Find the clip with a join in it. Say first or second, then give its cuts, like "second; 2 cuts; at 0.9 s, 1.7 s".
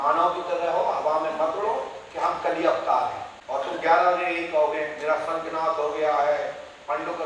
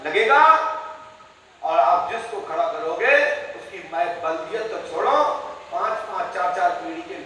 first; 1 cut; at 3.3 s